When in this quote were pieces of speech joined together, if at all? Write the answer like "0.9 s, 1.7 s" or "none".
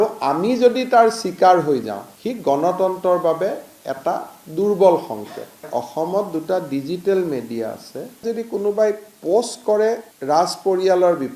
5.7 s, 8.2 s